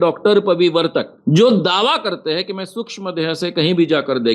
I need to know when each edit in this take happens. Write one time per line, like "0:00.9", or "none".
0:01.1